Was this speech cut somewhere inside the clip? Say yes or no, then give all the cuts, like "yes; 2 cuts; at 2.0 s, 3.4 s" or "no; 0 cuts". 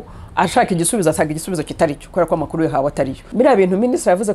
yes; 1 cut; at 3.2 s